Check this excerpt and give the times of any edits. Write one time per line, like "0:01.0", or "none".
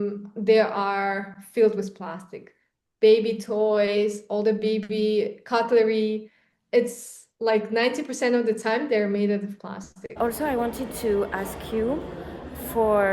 0:10.2